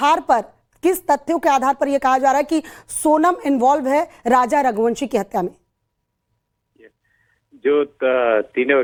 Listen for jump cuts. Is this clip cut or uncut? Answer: uncut